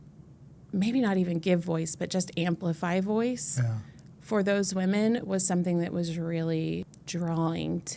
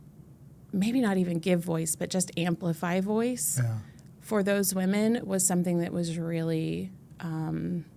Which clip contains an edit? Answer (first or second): first